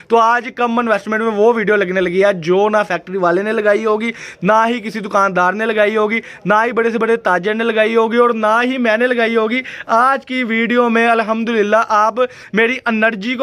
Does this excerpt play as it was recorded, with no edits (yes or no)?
yes